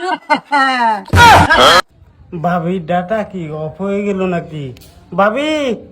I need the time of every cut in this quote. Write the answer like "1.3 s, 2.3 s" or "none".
1.8 s

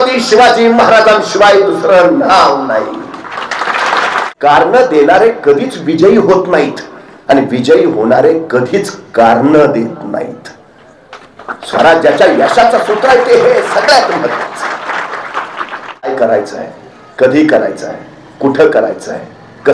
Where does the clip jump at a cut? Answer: 4.2 s, 16.1 s

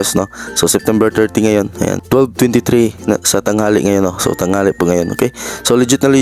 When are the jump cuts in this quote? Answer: 2.0 s

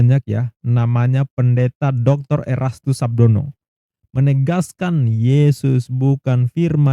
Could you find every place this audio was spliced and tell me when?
none

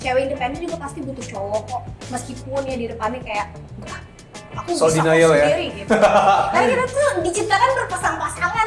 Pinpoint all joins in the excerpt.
none

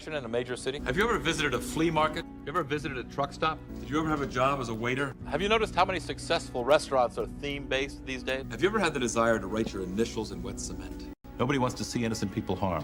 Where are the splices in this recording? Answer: none

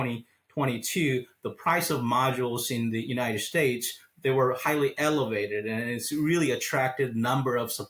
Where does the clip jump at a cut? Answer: none

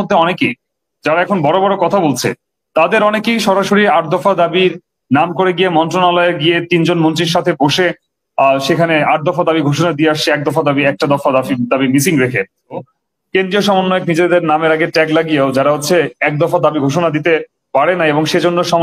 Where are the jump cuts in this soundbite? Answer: 12.8 s

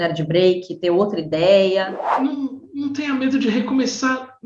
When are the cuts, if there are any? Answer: 2.0 s

